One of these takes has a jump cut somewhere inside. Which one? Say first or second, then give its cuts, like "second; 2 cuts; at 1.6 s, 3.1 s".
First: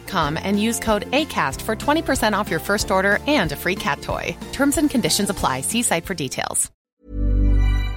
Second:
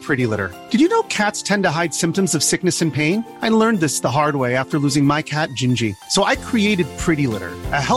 first; 1 cut; at 6.7 s